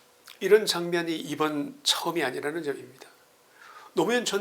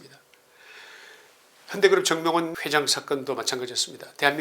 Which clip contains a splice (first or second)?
second